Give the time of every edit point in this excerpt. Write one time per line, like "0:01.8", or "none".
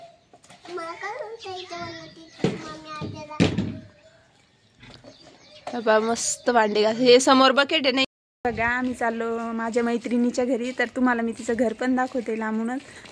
0:08.1